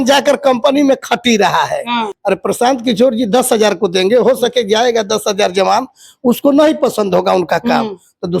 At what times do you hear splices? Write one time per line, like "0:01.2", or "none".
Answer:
0:02.1

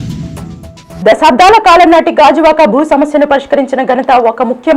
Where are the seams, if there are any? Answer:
0:01.0

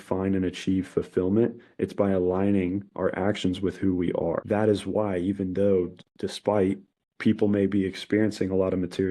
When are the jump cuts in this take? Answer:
0:04.4

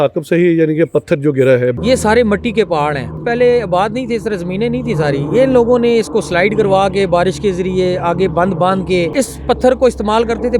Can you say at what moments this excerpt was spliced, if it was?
0:01.8
0:03.2
0:09.1

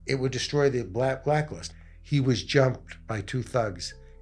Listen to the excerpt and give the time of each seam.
0:01.6

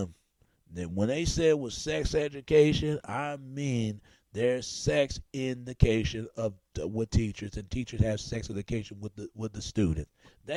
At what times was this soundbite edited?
none

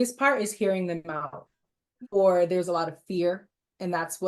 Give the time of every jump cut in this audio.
0:01.6

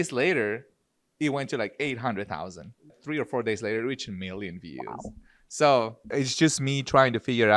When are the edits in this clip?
0:02.9
0:06.1

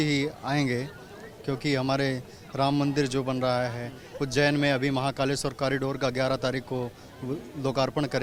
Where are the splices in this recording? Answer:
none

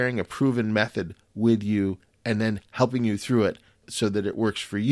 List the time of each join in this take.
0:03.9

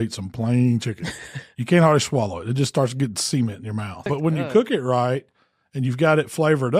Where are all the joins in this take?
0:04.1

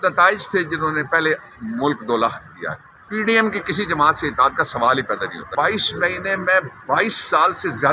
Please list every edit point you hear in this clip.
0:03.0
0:05.5

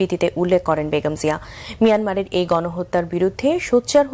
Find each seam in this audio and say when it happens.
0:03.2

